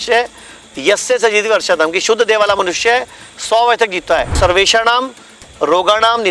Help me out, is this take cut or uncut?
cut